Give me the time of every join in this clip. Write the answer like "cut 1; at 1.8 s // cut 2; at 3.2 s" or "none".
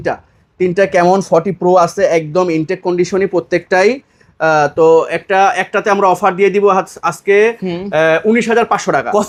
none